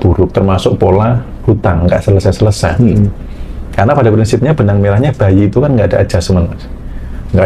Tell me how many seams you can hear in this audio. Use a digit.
0